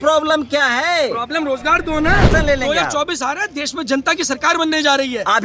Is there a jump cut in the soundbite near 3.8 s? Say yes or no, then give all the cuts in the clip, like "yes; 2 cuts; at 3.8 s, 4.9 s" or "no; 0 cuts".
no; 1 cut; at 2.3 s